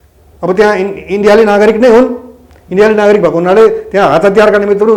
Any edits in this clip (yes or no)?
no